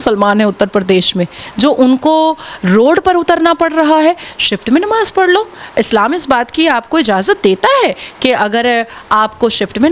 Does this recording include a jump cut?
no; 0 cuts

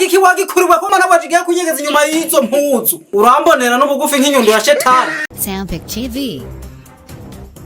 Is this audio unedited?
no; 1 cut; at 5.3 s

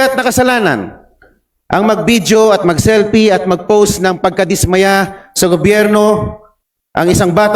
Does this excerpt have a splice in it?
no; 0 cuts

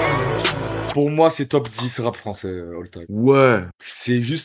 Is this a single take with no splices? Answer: no; 2 cuts; at 0.9 s, 1.5 s

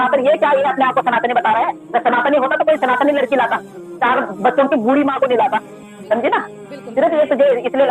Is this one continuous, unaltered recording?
yes; 0 cuts

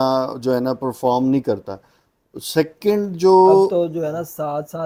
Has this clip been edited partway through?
no; 0 cuts

